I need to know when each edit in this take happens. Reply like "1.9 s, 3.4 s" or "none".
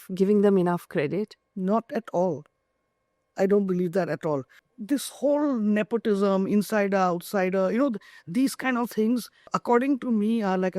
4.6 s, 9.5 s